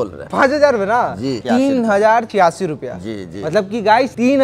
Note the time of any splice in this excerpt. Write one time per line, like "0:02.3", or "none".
0:01.4